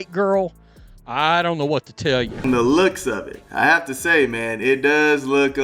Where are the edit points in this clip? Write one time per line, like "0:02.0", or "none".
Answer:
0:02.3

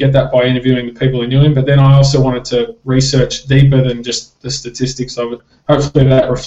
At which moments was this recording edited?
0:05.5

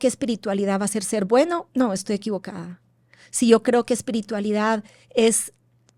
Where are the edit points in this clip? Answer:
none

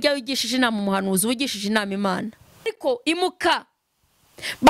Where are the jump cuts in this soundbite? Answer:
0:02.6

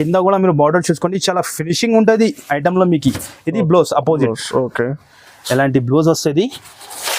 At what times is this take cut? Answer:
none

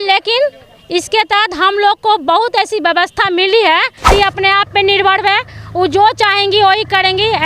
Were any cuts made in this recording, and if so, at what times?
0:04.1

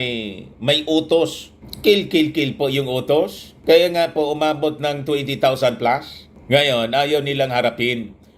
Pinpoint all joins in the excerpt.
0:03.4
0:07.3

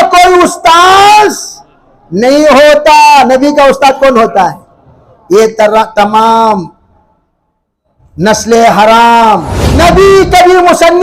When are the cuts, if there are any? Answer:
0:09.6

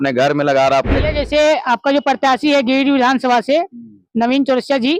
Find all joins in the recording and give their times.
0:00.9

